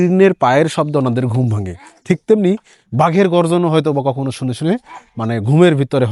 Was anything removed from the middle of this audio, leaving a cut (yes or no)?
no